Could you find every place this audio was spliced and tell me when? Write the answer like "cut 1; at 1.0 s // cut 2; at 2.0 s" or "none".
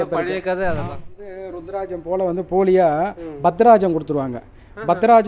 cut 1; at 1.1 s